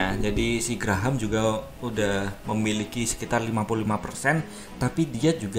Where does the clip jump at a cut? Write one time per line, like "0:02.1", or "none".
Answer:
none